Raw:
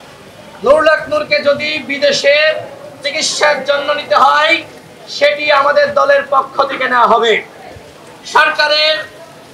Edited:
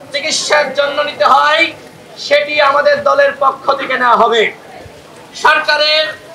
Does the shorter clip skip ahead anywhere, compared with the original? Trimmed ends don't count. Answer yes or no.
no